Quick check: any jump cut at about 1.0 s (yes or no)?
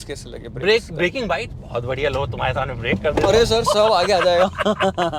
no